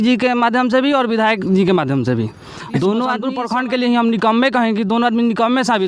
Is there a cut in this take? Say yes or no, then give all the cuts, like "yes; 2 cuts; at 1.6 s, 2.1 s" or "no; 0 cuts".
yes; 1 cut; at 3.4 s